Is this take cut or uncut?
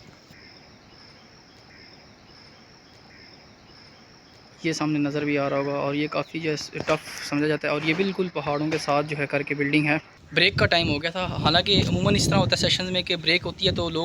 cut